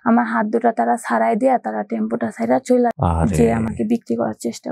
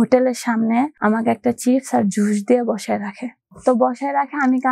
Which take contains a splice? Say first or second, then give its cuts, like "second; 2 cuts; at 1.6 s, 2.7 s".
first; 1 cut; at 2.9 s